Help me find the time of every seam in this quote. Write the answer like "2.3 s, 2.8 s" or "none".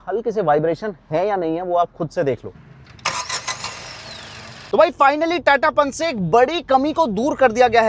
2.5 s, 4.6 s